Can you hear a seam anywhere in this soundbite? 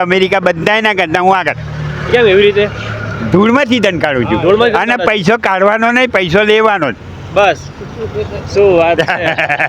no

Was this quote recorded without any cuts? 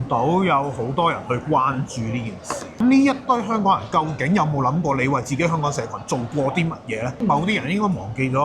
no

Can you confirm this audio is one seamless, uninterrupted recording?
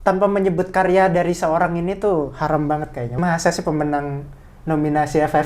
no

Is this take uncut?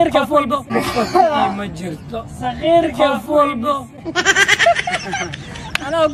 yes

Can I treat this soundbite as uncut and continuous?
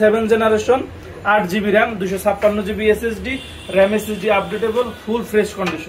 yes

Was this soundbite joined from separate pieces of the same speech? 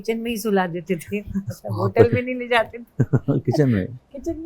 no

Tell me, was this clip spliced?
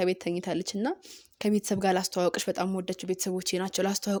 no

